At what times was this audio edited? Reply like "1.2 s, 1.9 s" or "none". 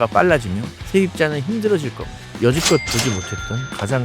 2.3 s